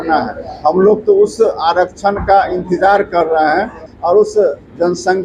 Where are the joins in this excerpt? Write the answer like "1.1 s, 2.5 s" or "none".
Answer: 3.9 s